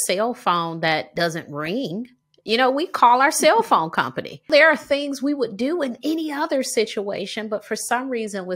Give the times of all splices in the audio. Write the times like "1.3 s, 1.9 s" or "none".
1.1 s, 4.5 s

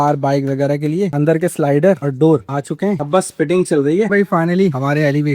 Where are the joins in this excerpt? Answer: 1.1 s, 3.0 s, 4.1 s

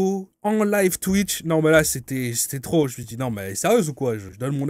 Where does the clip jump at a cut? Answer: none

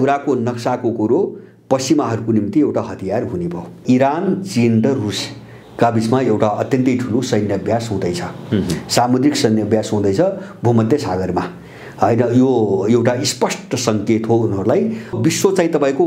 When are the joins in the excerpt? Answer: 3.8 s, 15.1 s

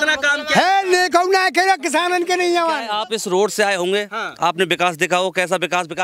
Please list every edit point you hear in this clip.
2.9 s

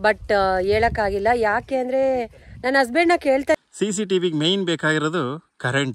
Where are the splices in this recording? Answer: 3.6 s

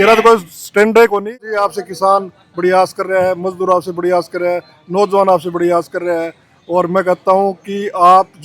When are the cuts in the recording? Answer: 1.4 s

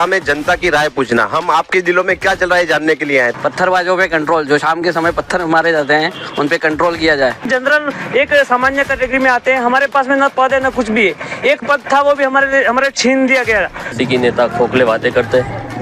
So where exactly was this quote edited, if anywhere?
3.3 s, 7.5 s, 13.9 s

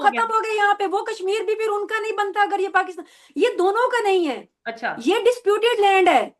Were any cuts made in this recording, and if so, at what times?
none

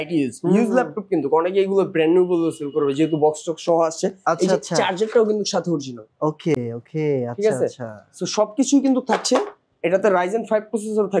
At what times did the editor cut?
none

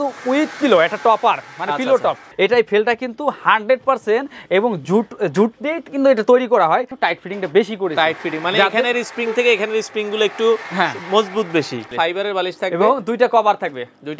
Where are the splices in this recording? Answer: 2.2 s, 6.9 s, 11.9 s

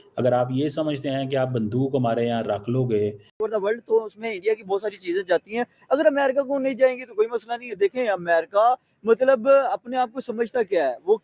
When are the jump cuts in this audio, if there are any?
3.4 s

